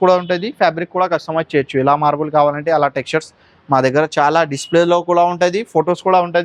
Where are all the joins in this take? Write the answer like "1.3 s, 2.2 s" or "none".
none